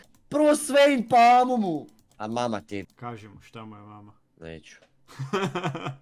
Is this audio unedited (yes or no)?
no